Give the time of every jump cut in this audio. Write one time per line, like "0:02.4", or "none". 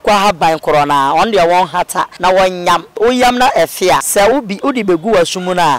0:02.1
0:02.9
0:04.1